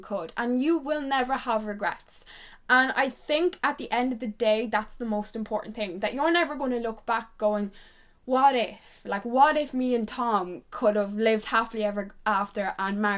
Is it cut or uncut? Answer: uncut